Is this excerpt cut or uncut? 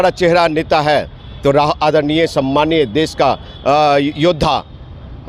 uncut